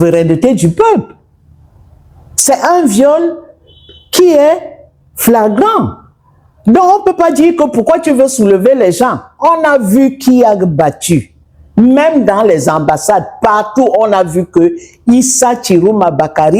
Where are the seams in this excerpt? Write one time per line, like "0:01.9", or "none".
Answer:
none

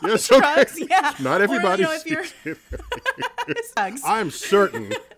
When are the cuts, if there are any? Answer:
0:03.8

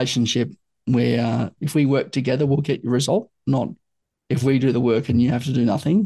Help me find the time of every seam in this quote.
0:01.5

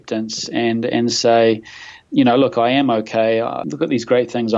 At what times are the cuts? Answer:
0:02.0
0:03.6

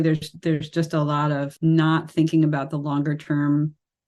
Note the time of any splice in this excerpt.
0:01.5

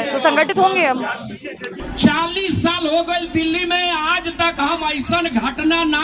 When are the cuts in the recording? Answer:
none

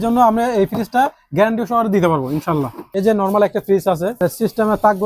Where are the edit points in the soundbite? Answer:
0:02.8
0:04.2

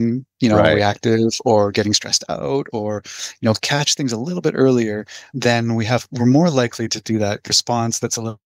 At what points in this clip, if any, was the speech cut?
0:05.3
0:07.5

